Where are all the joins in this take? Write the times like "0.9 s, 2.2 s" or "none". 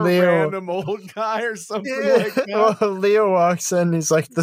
none